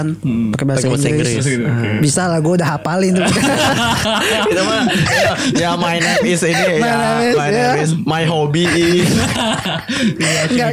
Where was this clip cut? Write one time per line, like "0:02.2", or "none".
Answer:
none